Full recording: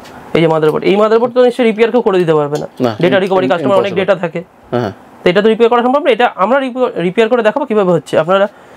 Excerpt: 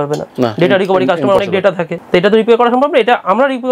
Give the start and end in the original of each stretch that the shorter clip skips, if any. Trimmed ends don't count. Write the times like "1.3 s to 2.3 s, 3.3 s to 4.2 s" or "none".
3.9 s to 4.6 s